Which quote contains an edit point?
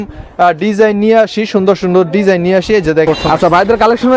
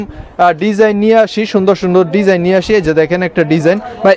first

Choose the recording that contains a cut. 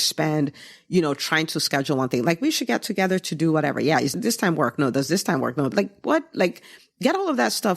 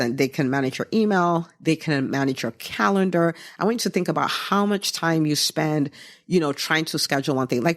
first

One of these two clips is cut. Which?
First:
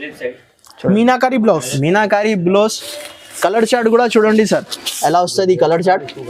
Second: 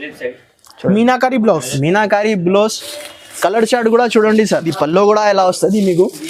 second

